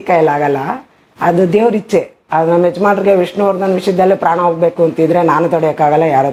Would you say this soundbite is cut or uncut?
uncut